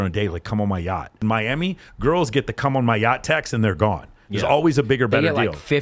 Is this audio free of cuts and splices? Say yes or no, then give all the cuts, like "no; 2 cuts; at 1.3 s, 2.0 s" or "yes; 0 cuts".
no; 1 cut; at 1.2 s